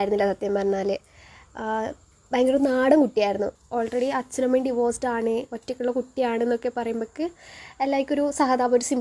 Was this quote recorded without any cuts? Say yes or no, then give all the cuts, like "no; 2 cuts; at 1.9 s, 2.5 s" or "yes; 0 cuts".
no; 1 cut; at 3.6 s